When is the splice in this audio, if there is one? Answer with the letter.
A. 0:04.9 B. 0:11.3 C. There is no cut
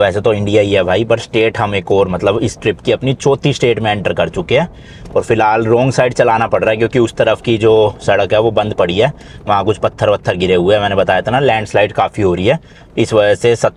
C